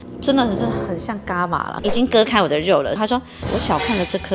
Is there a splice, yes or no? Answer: yes